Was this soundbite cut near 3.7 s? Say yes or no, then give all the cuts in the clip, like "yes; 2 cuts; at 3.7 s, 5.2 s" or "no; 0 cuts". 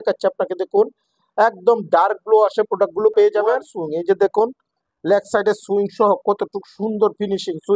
yes; 1 cut; at 3.7 s